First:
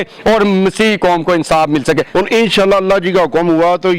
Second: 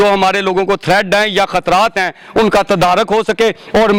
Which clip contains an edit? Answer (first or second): first